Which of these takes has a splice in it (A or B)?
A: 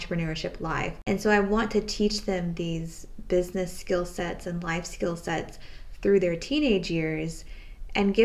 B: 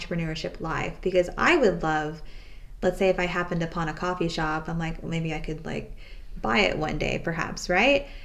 A